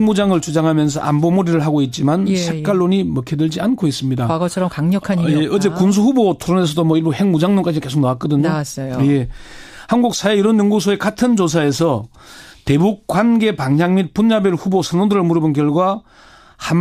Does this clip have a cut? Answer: no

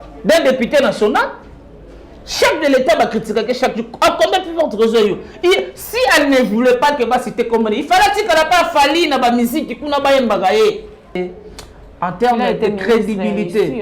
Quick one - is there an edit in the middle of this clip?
yes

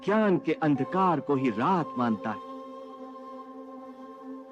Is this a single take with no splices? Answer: no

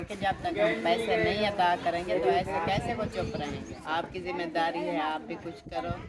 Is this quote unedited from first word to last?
no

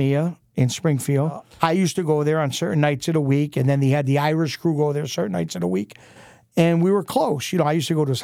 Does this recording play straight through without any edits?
no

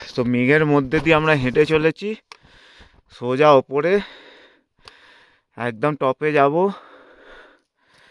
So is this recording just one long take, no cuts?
yes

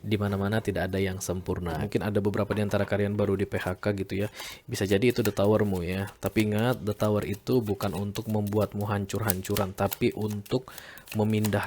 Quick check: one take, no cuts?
no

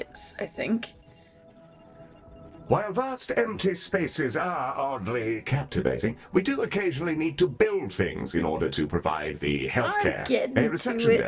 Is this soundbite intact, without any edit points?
yes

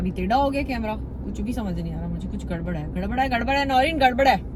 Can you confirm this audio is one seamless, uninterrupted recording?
yes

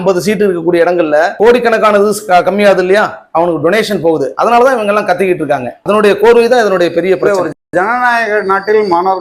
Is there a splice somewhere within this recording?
no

